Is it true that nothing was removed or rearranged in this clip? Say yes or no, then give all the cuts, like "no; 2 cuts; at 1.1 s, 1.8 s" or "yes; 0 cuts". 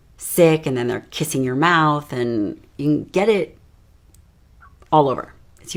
yes; 0 cuts